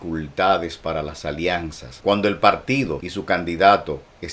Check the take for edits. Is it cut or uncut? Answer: cut